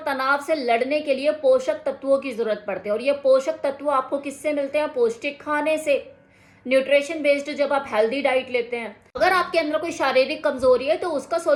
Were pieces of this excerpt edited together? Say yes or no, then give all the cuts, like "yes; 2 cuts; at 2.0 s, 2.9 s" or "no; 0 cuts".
no; 0 cuts